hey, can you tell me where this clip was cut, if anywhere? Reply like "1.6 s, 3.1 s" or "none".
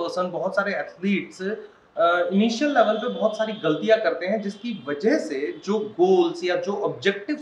none